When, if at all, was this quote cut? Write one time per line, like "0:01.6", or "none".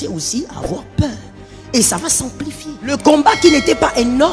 0:02.8